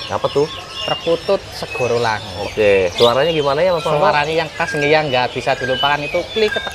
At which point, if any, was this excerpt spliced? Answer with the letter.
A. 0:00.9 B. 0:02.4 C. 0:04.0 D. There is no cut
B